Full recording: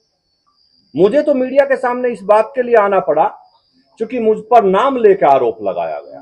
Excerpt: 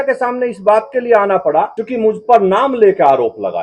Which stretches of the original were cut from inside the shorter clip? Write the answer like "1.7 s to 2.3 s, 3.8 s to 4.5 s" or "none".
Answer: 3.4 s to 4.0 s